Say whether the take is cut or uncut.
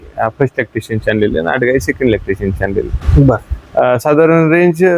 uncut